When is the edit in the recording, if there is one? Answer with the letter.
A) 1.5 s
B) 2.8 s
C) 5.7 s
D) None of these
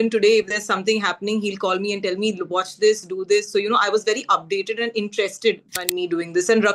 C